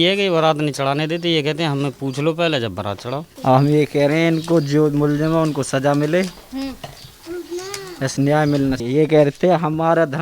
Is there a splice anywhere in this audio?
yes; 2 cuts; at 3.2 s, 8.8 s

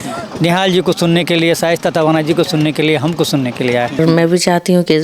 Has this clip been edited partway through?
yes; 1 cut; at 4.0 s

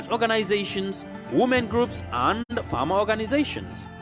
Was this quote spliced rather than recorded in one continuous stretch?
no; 0 cuts

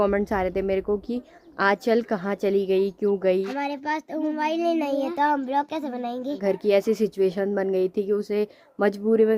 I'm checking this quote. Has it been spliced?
yes; 2 cuts; at 3.5 s, 6.4 s

